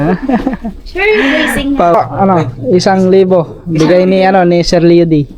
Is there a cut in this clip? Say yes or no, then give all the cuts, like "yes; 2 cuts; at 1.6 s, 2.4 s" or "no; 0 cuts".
yes; 1 cut; at 1.9 s